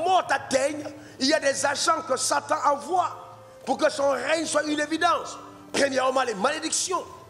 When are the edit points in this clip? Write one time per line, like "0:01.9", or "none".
none